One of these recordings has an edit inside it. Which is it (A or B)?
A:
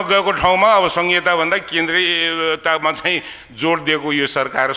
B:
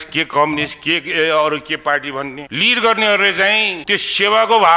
B